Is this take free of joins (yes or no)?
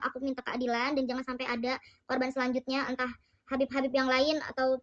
yes